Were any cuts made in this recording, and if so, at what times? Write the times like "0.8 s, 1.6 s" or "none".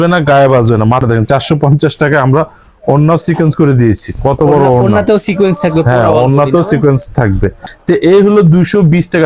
1.0 s, 7.7 s